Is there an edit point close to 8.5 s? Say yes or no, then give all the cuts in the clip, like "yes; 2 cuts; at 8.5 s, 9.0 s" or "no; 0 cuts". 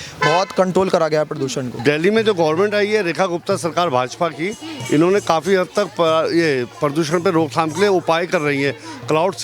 no; 1 cut; at 1.8 s